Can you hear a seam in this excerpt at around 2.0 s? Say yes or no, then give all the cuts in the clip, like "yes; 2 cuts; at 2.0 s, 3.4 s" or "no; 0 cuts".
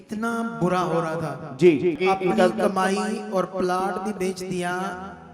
yes; 1 cut; at 2.0 s